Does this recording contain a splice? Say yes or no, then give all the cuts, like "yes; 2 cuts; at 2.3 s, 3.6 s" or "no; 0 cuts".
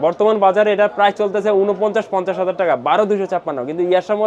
no; 0 cuts